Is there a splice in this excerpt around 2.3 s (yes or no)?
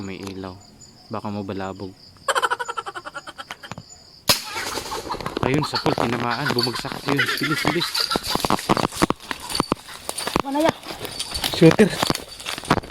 no